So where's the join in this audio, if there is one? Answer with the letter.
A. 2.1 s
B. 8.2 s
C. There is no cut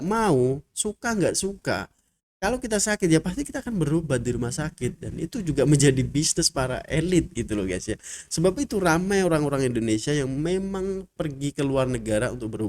C